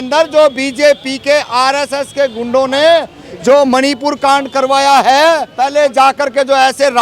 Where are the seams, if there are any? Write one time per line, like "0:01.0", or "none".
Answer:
0:05.5